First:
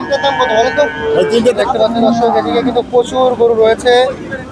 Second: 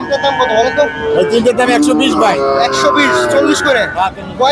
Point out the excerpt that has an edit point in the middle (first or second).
first